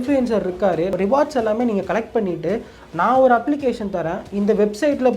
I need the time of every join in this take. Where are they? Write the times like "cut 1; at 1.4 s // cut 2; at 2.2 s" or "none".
cut 1; at 0.9 s